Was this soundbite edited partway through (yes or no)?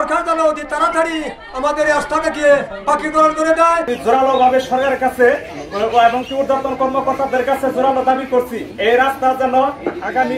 yes